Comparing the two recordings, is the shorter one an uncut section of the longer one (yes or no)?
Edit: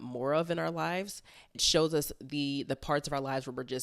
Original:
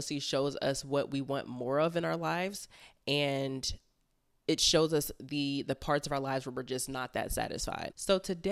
no